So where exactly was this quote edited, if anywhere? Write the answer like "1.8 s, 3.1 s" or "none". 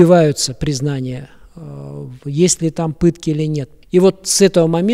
3.7 s